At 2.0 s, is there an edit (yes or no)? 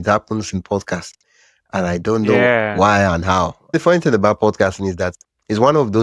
no